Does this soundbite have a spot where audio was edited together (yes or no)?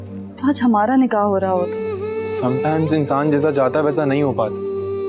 no